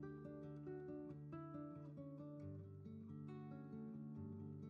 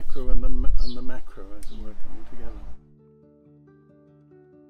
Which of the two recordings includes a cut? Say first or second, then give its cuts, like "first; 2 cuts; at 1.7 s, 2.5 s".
second; 1 cut; at 2.7 s